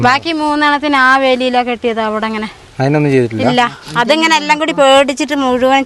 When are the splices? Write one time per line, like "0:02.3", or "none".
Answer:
none

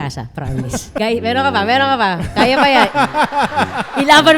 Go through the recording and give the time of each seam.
0:01.0

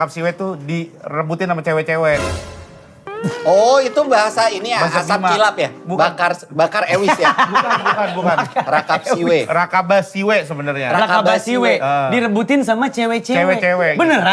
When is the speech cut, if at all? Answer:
none

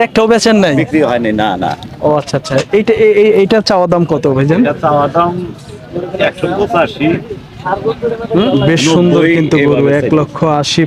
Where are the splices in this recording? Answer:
none

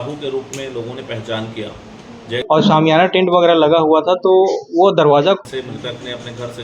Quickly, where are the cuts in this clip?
0:02.3
0:05.4

